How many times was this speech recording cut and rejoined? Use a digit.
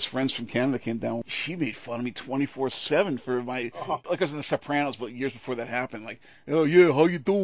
1